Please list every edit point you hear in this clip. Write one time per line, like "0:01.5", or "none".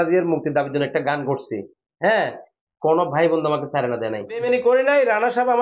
0:04.4